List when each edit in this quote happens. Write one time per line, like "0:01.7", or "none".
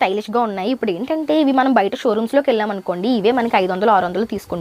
none